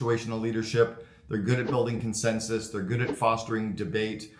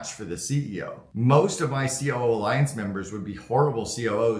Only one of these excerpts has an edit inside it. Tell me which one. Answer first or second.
second